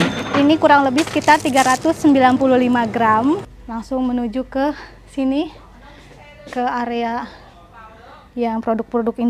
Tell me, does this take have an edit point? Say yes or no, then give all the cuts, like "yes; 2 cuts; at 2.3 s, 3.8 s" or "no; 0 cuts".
yes; 1 cut; at 3.6 s